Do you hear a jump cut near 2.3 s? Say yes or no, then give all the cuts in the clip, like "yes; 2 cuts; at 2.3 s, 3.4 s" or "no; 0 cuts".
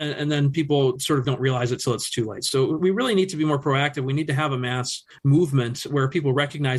no; 0 cuts